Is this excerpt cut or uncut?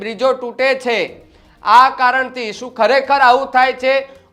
uncut